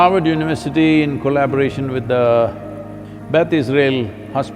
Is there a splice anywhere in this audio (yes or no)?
no